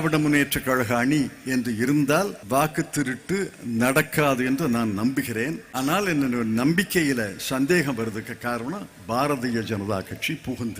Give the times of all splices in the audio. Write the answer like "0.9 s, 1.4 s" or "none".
2.4 s, 5.6 s